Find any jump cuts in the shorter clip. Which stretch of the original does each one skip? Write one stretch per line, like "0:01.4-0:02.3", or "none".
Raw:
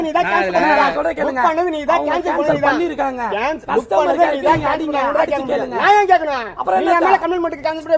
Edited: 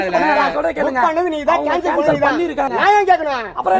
0:03.1-0:05.7